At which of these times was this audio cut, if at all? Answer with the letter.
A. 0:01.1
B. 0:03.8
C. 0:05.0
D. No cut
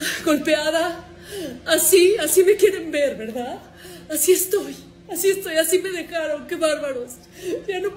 D